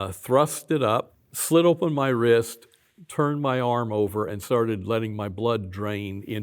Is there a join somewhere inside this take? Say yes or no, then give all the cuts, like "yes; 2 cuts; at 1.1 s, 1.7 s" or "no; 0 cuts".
yes; 1 cut; at 1.3 s